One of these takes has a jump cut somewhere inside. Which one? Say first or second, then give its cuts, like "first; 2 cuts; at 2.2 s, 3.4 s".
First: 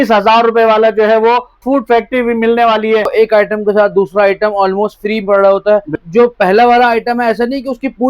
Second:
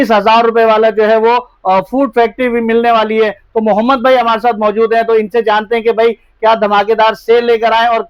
first; 3 cuts; at 1.6 s, 3.1 s, 6.0 s